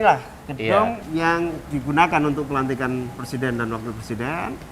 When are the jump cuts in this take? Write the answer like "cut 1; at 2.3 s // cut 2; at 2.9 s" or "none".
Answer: cut 1; at 1.0 s